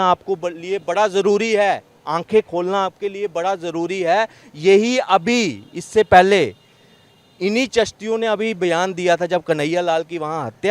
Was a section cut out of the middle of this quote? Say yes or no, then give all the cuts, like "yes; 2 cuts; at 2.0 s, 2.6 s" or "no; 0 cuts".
no; 0 cuts